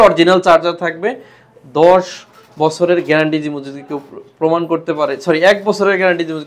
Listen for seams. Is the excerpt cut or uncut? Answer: uncut